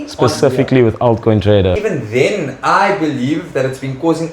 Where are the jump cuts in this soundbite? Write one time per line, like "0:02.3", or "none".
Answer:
0:01.8